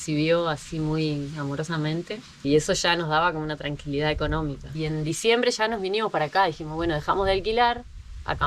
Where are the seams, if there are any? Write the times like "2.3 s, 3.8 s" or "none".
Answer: 4.7 s